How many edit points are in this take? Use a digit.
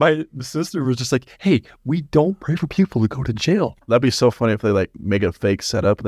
1